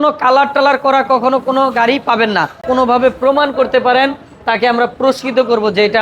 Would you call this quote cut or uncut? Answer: cut